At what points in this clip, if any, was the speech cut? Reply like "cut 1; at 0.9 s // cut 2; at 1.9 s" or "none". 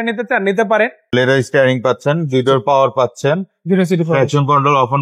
cut 1; at 1.0 s